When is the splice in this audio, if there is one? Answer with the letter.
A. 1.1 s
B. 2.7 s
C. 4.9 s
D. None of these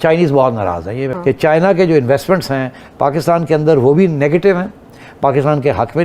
A